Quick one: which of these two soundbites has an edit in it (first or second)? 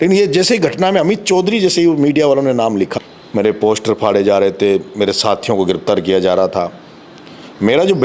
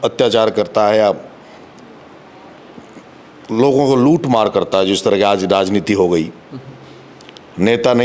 first